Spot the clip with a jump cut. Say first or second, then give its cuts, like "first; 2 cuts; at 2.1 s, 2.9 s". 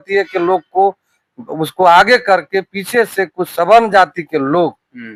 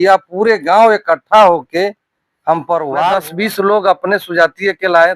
second; 1 cut; at 3.2 s